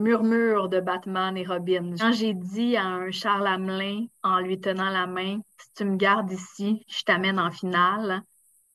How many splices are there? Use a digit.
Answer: 1